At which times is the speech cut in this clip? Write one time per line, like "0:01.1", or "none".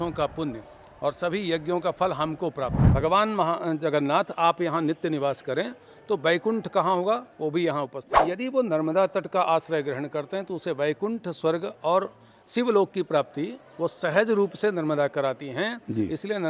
0:02.8
0:08.1